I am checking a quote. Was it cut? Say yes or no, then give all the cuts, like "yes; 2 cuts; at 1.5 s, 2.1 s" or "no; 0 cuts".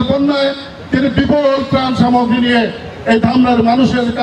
no; 0 cuts